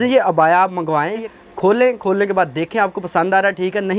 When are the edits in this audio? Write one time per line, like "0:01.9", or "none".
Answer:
0:01.2